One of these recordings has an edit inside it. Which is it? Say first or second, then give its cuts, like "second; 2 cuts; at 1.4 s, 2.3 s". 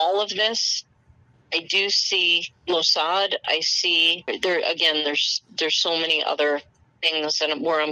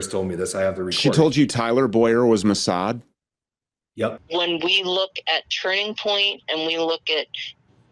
second; 1 cut; at 4.2 s